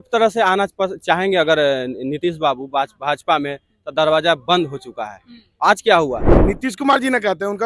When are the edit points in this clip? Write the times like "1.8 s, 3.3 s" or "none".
6.3 s